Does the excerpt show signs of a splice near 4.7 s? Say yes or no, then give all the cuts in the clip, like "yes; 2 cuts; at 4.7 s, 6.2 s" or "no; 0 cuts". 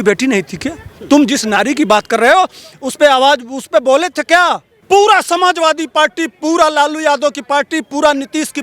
yes; 1 cut; at 4.7 s